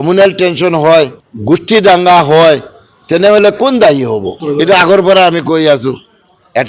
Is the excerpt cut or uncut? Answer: cut